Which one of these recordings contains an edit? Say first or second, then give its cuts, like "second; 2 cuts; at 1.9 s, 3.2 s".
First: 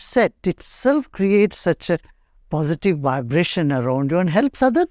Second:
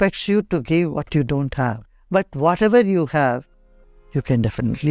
second; 1 cut; at 1.9 s